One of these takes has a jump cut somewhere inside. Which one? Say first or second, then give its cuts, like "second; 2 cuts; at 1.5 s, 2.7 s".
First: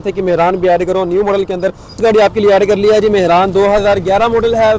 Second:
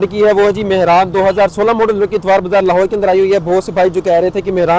first; 1 cut; at 1.9 s